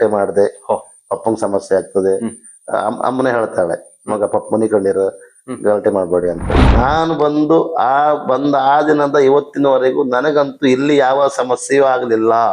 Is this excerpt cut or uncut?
cut